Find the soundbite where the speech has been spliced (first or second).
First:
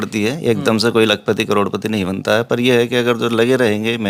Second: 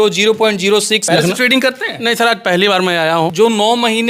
second